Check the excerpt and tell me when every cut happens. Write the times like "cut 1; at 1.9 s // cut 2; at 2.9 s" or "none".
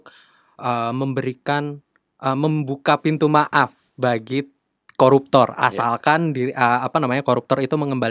none